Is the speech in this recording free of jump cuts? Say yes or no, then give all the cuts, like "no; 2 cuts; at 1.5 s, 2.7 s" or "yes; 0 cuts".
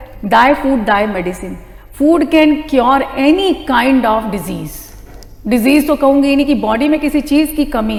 yes; 0 cuts